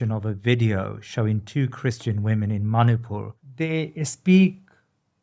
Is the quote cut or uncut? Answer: cut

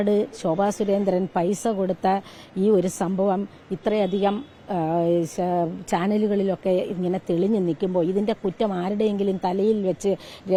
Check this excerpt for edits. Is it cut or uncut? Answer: uncut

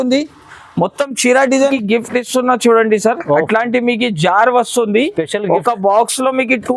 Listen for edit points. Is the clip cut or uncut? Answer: cut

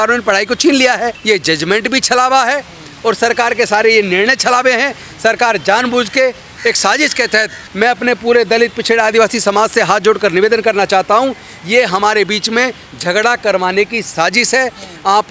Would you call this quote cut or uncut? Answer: cut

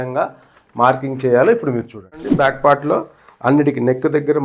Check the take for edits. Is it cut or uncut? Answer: cut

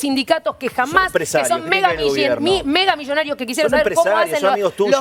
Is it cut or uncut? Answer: uncut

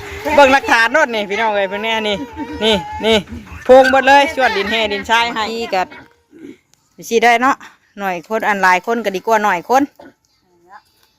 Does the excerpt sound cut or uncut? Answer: cut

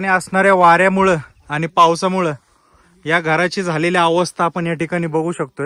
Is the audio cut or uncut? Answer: uncut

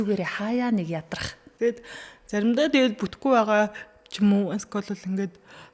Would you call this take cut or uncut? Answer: cut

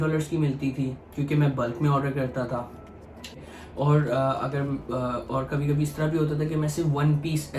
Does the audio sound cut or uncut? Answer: uncut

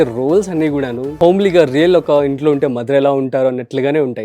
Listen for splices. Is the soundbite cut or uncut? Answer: cut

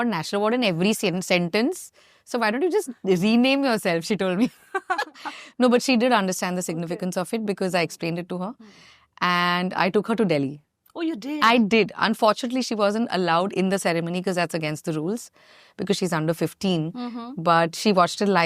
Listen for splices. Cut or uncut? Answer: uncut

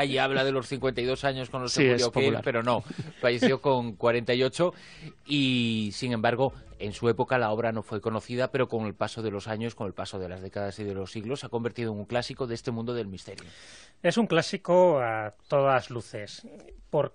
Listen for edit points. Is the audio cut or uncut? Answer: cut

